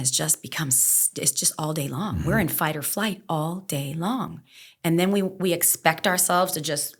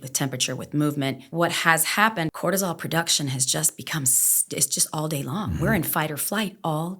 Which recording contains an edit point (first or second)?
second